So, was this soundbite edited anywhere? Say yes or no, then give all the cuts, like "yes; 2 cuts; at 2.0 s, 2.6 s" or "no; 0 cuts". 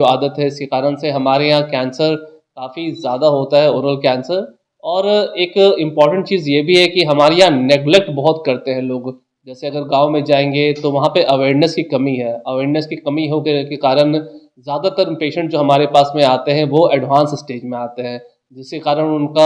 no; 0 cuts